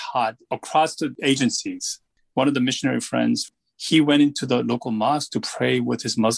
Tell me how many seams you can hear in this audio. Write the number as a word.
two